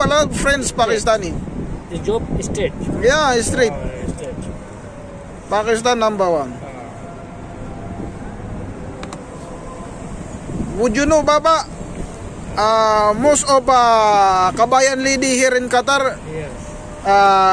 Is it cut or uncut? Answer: uncut